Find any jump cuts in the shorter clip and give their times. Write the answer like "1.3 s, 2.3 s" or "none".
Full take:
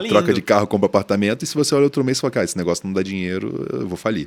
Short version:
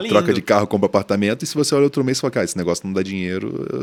none